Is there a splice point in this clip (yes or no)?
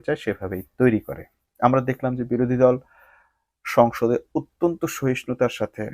no